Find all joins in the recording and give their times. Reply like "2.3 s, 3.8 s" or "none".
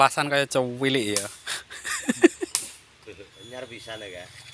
3.4 s